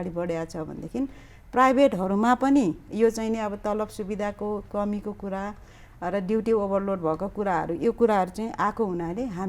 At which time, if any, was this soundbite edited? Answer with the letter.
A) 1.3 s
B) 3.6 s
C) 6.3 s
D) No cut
D